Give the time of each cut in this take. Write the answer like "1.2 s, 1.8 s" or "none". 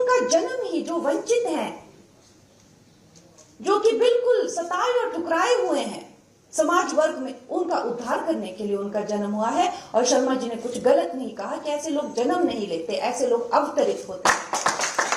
none